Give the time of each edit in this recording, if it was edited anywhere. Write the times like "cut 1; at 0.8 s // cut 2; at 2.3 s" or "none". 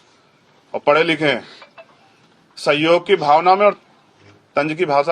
cut 1; at 3.8 s